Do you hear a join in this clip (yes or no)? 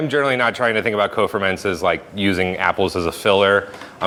no